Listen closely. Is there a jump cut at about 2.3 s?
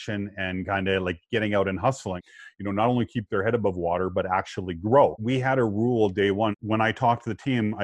yes; 3 cuts; at 2.3 s, 5.2 s, 6.6 s

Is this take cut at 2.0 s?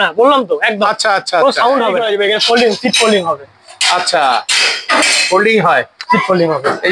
yes; 1 cut; at 2.0 s

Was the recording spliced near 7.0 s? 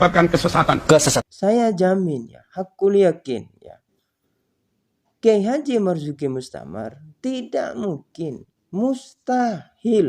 no; 1 cut; at 1.3 s

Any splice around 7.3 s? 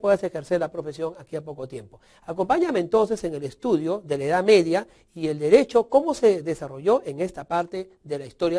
yes; 1 cut; at 7.3 s

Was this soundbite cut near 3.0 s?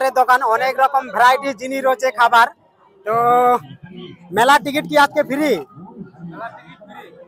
no; 0 cuts

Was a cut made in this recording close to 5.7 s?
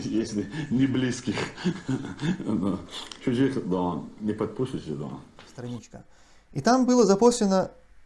yes; 1 cut; at 5.7 s

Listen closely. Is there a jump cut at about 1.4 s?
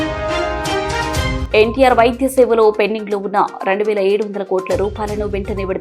yes; 1 cut; at 1.4 s

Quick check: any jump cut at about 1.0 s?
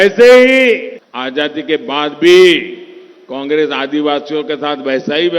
yes; 1 cut; at 1.0 s

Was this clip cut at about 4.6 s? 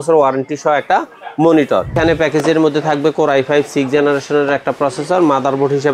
no; 1 cut; at 1.9 s

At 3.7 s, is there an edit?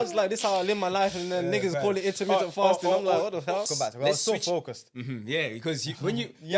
yes; 1 cut; at 3.7 s

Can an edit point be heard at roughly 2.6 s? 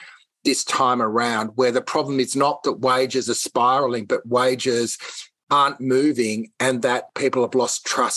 no; 1 cut; at 7.1 s

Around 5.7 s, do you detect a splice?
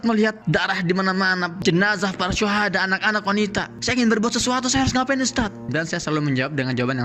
yes; 1 cut; at 5.7 s

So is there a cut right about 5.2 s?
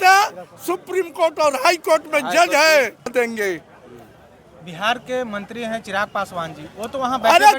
no; 1 cut; at 3.1 s

